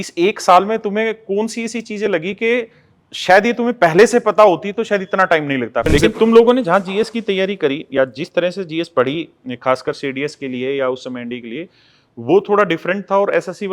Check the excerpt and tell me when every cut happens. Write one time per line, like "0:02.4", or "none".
0:05.9